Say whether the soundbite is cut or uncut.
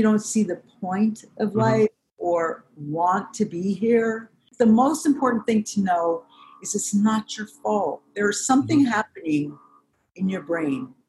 cut